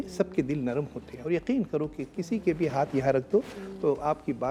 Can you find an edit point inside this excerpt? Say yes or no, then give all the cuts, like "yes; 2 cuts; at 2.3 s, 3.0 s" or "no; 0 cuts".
no; 0 cuts